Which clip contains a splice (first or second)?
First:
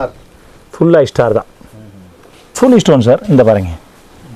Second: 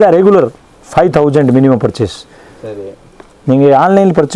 first